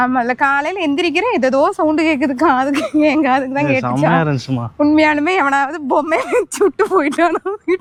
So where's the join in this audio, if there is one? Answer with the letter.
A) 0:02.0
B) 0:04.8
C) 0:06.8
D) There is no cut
D